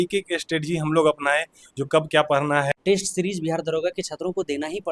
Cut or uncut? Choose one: cut